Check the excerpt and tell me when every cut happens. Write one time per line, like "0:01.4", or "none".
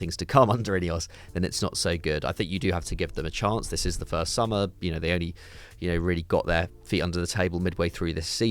none